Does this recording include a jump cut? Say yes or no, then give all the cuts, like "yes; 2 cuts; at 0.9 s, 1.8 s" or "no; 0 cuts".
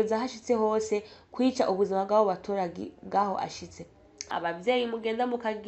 yes; 1 cut; at 4.3 s